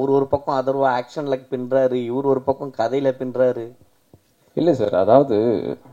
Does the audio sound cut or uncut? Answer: uncut